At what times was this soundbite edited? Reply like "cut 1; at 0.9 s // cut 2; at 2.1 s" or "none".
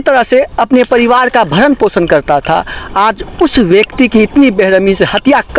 none